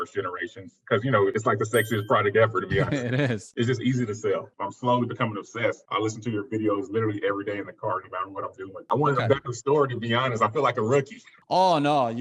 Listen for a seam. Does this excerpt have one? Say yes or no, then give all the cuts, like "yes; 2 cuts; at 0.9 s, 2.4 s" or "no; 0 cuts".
yes; 2 cuts; at 4.5 s, 8.8 s